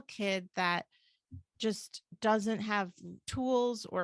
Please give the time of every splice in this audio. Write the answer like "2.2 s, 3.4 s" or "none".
none